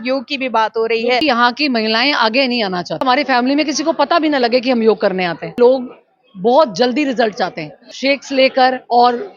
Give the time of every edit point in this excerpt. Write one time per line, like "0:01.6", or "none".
0:01.2
0:03.0
0:05.5
0:07.9